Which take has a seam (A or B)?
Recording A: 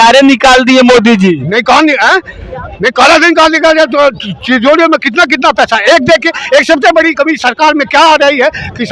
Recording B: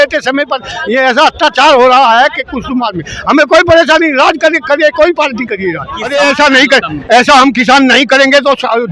B